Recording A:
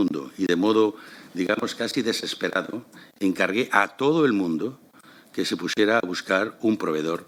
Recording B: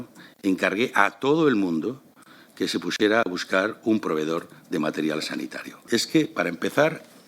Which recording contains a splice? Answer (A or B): B